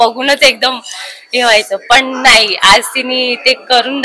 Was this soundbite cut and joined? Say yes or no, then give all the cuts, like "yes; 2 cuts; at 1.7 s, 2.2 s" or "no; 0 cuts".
no; 0 cuts